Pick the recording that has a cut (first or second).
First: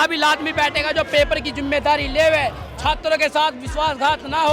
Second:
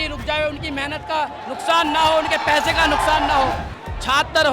second